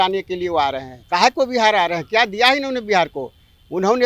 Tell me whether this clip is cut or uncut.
cut